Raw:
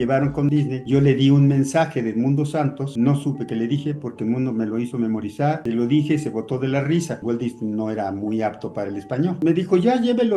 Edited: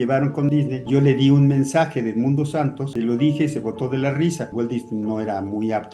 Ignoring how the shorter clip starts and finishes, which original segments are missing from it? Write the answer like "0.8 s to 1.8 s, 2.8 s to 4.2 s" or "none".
2.9 s to 5.6 s

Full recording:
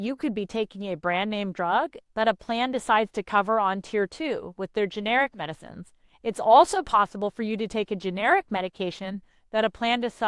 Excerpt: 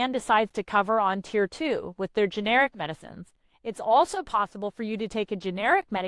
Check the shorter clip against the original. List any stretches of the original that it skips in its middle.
none

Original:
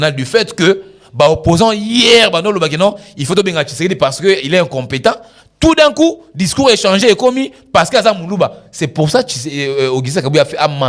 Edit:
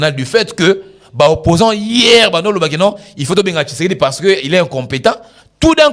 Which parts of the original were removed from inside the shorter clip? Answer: none

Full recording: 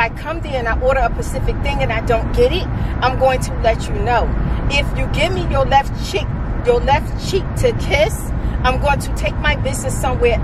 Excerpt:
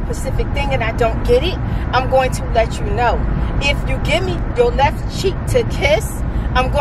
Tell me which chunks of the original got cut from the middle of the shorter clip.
5.5 s to 6.5 s

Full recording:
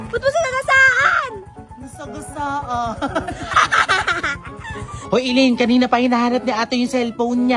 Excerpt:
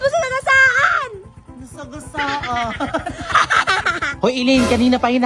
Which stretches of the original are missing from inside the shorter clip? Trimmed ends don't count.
4.3 s to 5.0 s

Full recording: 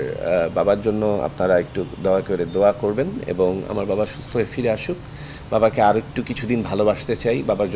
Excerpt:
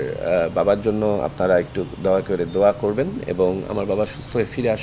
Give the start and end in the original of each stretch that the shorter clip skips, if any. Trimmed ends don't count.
none

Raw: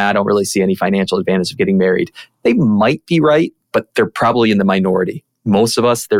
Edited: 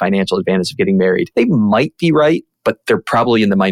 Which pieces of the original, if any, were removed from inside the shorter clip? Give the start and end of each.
2.1 s to 2.4 s

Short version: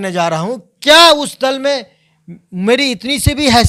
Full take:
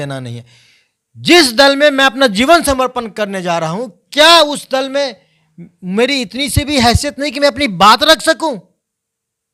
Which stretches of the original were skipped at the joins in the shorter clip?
none

